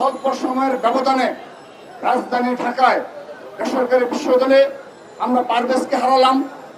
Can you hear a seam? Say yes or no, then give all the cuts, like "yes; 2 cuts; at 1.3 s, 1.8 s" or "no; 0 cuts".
no; 0 cuts